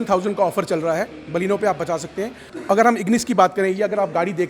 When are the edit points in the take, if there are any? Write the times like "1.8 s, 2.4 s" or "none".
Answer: 2.5 s